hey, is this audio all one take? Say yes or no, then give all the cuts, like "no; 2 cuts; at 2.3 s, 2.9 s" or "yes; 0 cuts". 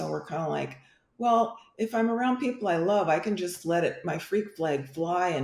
yes; 0 cuts